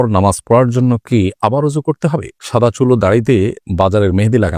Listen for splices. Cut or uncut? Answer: cut